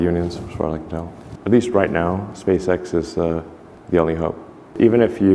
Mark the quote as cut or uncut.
cut